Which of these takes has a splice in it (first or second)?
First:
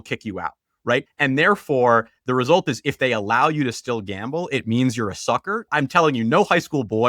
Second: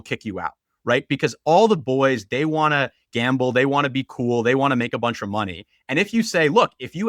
first